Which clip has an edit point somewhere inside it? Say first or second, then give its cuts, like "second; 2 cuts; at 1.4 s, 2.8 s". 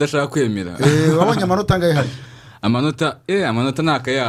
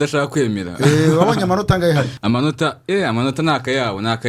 second; 1 cut; at 2.1 s